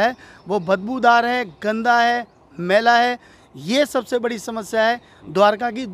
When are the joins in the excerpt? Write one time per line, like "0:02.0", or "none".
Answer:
none